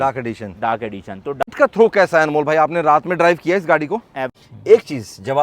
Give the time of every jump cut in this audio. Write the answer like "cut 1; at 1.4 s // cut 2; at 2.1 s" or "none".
cut 1; at 1.5 s // cut 2; at 4.2 s